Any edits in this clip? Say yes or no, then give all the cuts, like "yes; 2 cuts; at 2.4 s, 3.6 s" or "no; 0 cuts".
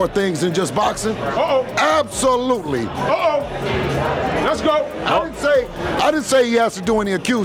no; 0 cuts